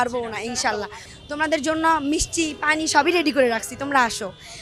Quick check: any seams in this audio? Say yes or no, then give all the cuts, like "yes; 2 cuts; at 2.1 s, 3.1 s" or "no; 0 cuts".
no; 0 cuts